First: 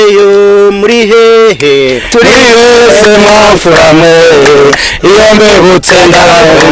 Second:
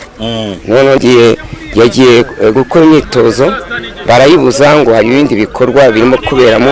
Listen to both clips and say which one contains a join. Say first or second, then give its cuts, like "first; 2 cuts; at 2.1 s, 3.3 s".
second; 1 cut; at 1.0 s